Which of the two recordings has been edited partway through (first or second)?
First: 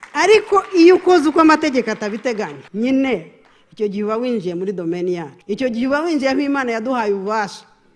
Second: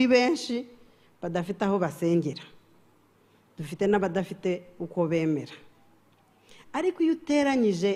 first